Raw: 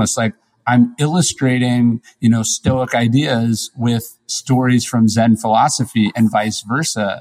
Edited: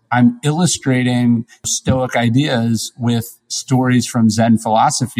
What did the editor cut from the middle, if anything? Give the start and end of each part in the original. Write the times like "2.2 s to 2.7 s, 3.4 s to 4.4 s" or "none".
2.2 s to 2.4 s